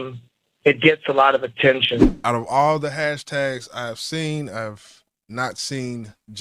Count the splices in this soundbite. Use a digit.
1